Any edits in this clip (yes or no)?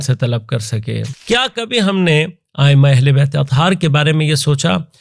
yes